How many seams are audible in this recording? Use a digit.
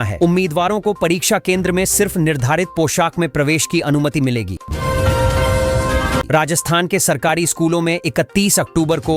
2